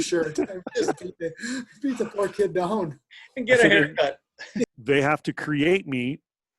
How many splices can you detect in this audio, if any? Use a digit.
1